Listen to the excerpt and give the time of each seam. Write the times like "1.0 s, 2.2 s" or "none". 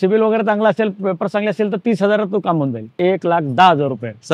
3.0 s